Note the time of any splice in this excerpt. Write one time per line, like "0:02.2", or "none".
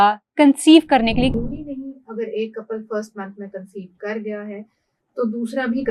0:01.3